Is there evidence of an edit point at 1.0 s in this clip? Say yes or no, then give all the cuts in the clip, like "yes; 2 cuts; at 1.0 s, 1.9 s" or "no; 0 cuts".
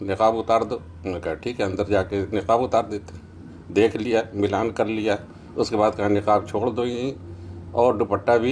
no; 0 cuts